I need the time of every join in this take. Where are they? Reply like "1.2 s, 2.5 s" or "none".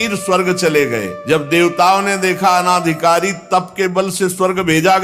1.1 s